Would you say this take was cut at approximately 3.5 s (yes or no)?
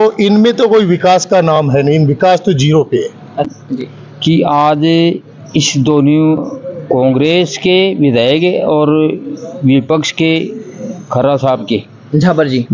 yes